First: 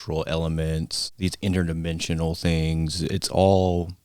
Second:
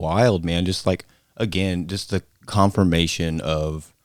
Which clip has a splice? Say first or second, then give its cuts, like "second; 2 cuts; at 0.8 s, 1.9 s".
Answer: first; 1 cut; at 1.0 s